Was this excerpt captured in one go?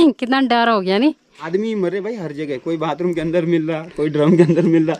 no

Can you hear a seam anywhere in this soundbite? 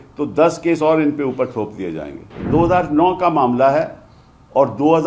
yes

